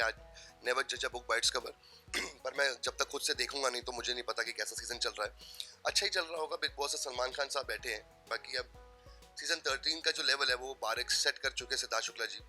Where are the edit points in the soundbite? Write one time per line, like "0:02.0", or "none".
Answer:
none